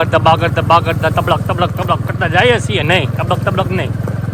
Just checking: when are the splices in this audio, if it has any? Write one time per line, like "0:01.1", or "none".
none